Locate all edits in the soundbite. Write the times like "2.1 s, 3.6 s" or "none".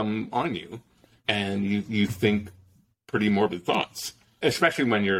1.1 s, 4.3 s